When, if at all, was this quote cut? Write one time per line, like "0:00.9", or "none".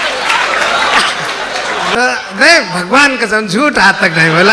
0:01.9